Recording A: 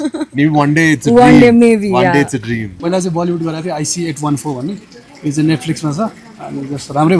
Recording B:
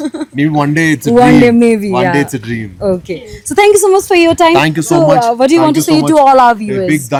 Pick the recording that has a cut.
A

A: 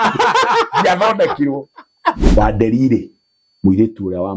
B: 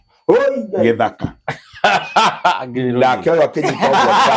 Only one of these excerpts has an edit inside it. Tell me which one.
A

